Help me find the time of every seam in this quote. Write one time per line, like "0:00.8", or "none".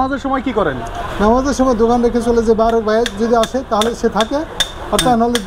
none